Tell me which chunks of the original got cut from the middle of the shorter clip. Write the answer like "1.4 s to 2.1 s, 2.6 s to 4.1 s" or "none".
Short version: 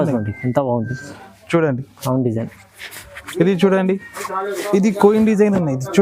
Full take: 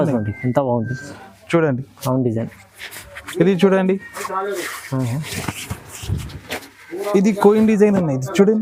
4.6 s to 7.0 s